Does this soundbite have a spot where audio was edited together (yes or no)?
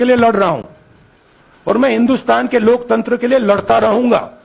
no